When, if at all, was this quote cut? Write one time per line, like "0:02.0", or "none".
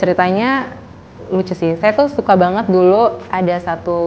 none